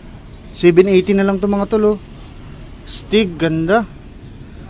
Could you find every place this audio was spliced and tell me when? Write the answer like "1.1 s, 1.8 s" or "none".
none